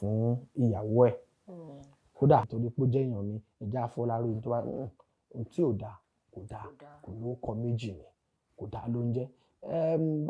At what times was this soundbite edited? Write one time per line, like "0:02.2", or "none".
0:02.5